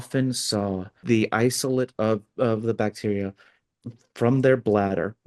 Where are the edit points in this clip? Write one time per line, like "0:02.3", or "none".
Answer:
0:01.0